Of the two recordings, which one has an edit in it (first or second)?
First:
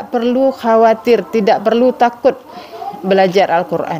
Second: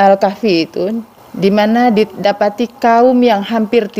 second